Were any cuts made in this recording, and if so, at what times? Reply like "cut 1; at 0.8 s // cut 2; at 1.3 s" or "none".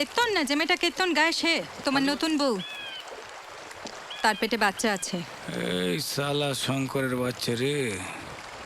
cut 1; at 1.7 s // cut 2; at 5.4 s